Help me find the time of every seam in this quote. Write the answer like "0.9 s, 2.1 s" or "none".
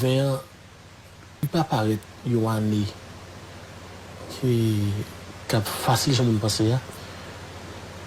1.4 s